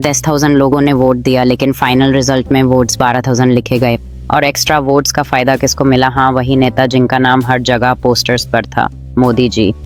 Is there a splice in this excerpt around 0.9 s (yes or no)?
no